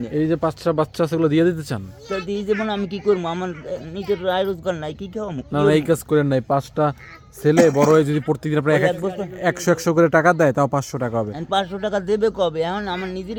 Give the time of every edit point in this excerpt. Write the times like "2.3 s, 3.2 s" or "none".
none